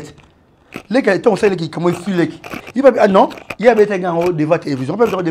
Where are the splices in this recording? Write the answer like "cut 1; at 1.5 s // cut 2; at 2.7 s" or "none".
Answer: none